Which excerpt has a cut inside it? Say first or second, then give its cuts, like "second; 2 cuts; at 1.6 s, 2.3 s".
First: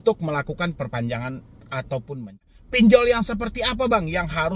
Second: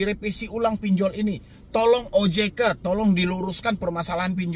first; 1 cut; at 2.6 s